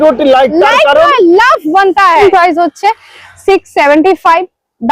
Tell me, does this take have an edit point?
yes; 1 cut; at 2.2 s

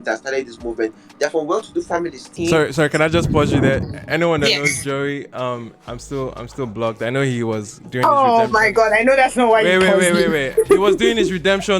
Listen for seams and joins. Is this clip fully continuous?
no; 1 cut; at 2.3 s

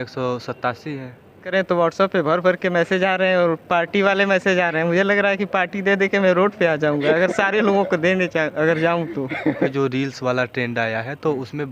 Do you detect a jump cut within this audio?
yes; 2 cuts; at 1.4 s, 9.7 s

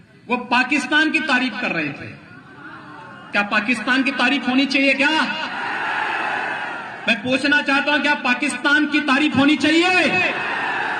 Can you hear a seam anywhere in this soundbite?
no; 0 cuts

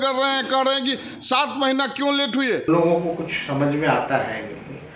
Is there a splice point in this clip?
yes; 1 cut; at 2.7 s

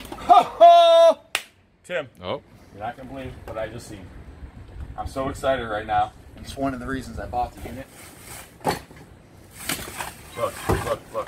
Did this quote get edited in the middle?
no; 0 cuts

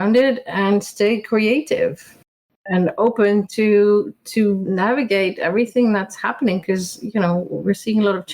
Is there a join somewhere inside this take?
yes; 2 cuts; at 2.5 s, 4.7 s

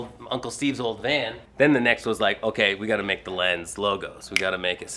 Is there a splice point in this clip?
yes; 1 cut; at 1.4 s

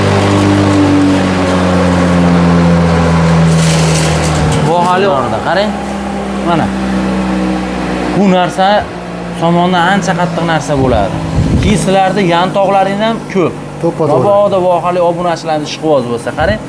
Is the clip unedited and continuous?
no; 1 cut; at 5.1 s

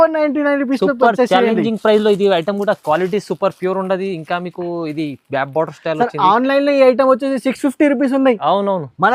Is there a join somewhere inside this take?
no; 0 cuts

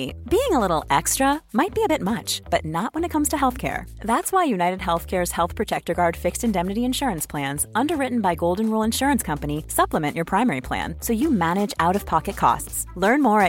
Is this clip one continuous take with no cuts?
yes; 0 cuts

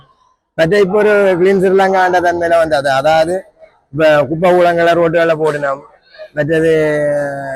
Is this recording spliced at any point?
no; 0 cuts

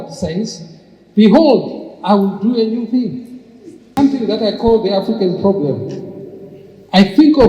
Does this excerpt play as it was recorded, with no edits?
no; 1 cut; at 3.9 s

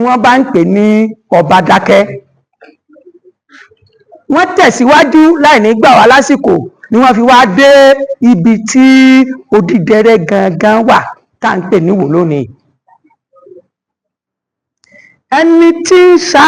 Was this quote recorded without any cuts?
yes; 0 cuts

